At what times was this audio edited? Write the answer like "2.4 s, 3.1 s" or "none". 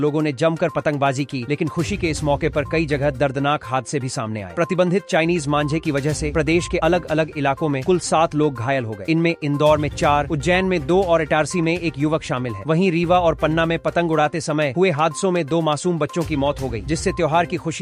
none